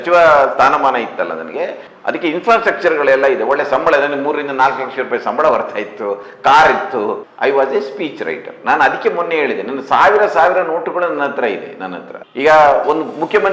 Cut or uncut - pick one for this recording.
cut